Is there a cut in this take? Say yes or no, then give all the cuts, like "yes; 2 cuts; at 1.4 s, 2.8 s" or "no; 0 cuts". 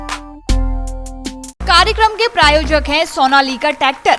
yes; 1 cut; at 1.6 s